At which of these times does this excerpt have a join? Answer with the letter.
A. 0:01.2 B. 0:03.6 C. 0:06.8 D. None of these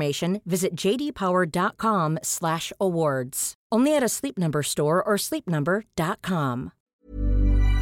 C